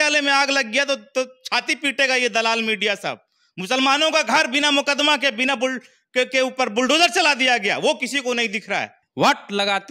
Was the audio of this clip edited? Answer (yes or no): yes